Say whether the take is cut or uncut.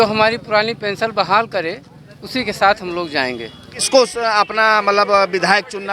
cut